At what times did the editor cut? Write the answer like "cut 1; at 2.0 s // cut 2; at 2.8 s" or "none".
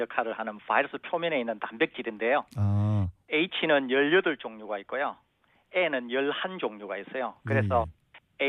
none

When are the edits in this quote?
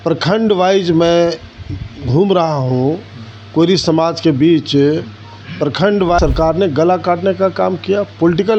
cut 1; at 6.2 s

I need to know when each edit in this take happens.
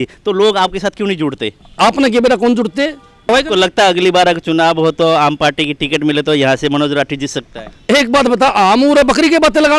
cut 1; at 3.3 s

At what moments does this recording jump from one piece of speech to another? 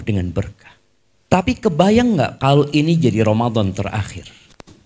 cut 1; at 1.4 s

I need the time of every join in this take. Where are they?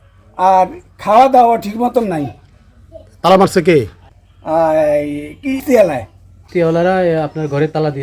cut 1; at 4.0 s // cut 2; at 6.4 s

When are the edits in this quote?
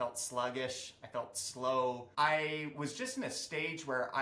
cut 1; at 2.0 s

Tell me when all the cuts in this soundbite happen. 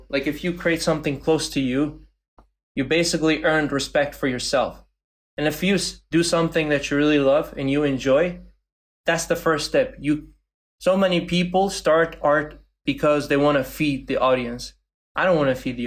none

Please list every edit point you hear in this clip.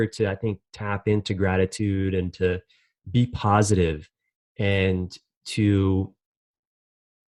none

